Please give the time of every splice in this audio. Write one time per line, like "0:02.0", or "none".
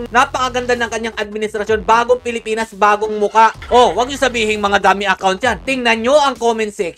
0:03.6